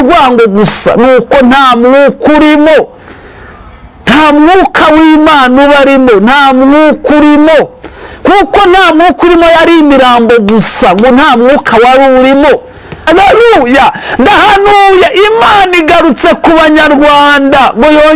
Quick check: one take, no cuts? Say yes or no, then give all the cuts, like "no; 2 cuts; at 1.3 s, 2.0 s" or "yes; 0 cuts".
no; 1 cut; at 12.9 s